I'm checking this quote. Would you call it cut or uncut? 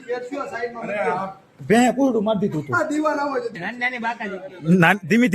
cut